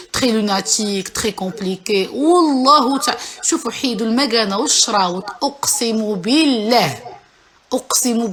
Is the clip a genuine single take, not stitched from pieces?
yes; 0 cuts

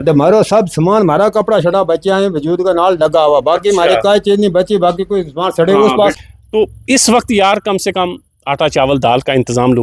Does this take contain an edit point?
yes; 1 cut; at 6.1 s

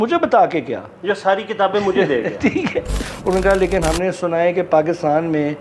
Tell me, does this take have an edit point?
yes; 1 cut; at 3.1 s

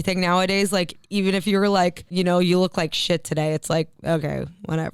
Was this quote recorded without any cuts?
no; 2 cuts; at 1.0 s, 2.0 s

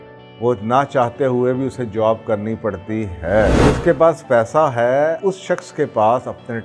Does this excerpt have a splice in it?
yes; 2 cuts; at 3.6 s, 5.2 s

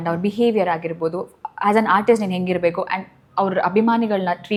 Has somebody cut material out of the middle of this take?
no; 0 cuts

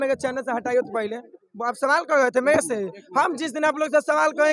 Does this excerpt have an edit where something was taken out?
no; 0 cuts

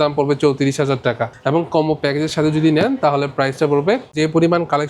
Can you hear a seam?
yes; 2 cuts; at 1.3 s, 4.1 s

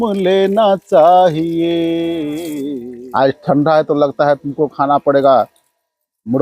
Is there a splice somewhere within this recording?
yes; 1 cut; at 2.6 s

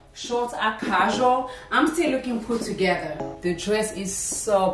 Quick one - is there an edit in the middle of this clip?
yes; 1 cut; at 3.2 s

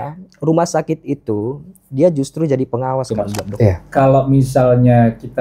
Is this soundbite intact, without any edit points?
no; 1 cut; at 3.4 s

